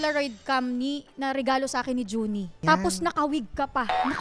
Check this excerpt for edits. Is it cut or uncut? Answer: cut